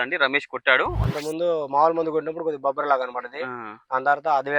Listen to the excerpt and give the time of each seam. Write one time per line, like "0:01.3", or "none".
0:01.0